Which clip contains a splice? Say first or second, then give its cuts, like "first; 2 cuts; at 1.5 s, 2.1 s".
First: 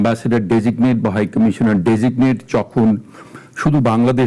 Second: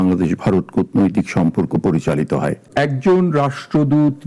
second; 1 cut; at 2.7 s